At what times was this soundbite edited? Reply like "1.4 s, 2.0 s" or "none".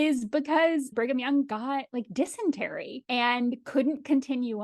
0.9 s